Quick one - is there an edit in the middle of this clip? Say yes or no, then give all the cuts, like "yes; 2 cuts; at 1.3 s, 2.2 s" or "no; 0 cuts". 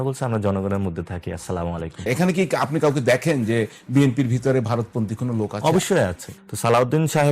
yes; 2 cuts; at 2.1 s, 6.3 s